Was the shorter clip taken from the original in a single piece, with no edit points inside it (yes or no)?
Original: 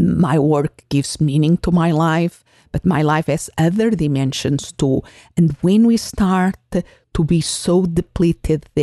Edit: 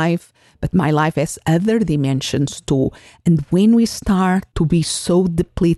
no